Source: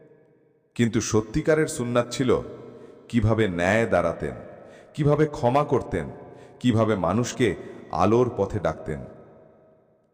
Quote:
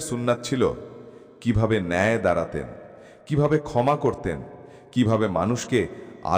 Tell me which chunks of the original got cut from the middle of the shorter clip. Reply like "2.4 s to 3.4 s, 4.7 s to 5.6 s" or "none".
none